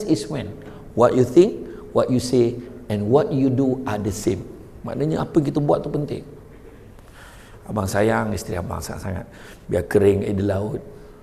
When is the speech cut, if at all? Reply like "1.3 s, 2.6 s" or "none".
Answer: none